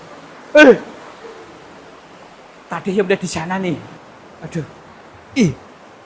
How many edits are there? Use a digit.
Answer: 1